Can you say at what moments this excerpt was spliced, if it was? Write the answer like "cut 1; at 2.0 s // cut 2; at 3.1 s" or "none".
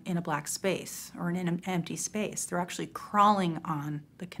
none